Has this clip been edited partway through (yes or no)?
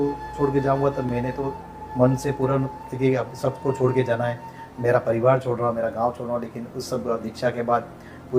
no